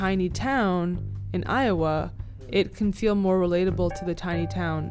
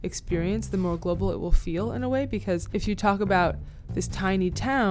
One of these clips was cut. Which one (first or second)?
second